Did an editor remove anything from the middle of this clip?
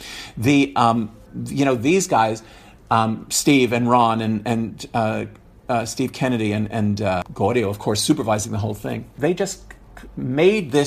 yes; 2 cuts; at 7.2 s, 9.1 s

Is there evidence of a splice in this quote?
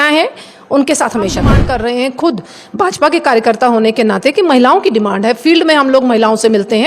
yes; 1 cut; at 1.6 s

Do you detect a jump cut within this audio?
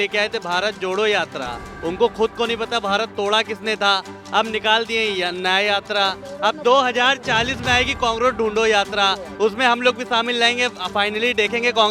no; 0 cuts

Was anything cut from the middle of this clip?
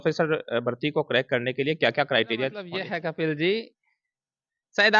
yes; 1 cut; at 2.8 s

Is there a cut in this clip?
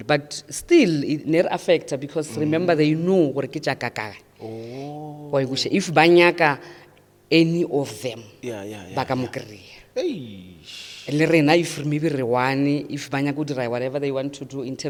no; 0 cuts

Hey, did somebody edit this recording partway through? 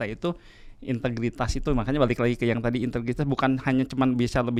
no; 0 cuts

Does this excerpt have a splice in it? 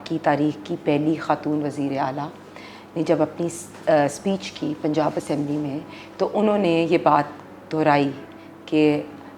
no; 0 cuts

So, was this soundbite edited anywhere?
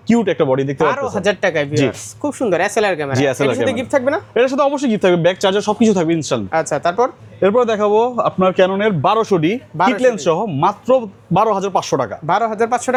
no; 0 cuts

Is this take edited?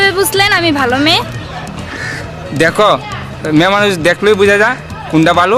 no; 0 cuts

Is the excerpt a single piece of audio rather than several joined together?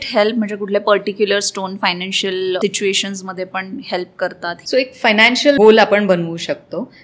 no; 3 cuts; at 2.6 s, 4.6 s, 5.6 s

